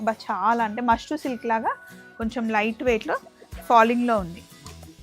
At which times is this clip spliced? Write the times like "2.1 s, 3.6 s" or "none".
none